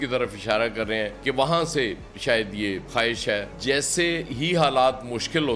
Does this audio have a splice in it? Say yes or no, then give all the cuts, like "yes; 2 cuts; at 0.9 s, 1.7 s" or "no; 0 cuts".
yes; 1 cut; at 3.5 s